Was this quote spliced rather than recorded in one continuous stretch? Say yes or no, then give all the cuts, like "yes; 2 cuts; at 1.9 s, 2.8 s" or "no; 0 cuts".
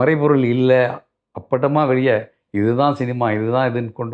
no; 0 cuts